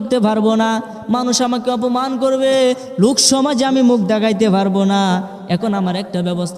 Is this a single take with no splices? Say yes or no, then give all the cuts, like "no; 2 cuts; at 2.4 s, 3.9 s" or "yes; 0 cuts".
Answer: yes; 0 cuts